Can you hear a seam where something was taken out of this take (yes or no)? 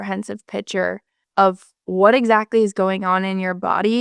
yes